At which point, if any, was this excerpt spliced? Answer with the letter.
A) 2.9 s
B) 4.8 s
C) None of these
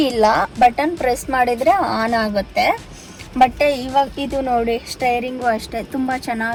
C